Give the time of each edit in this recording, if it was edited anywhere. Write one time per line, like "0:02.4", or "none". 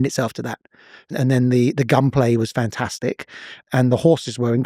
0:01.1
0:03.6